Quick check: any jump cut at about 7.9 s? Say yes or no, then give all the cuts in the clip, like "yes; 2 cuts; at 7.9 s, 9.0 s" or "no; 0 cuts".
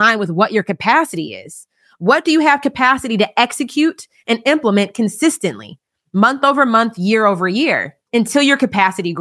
yes; 1 cut; at 7.9 s